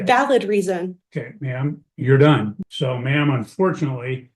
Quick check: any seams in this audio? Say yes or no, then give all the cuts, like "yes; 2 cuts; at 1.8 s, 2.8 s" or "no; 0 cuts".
yes; 1 cut; at 2.6 s